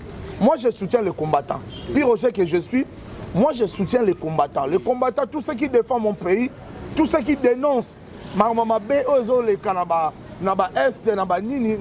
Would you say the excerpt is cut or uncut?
uncut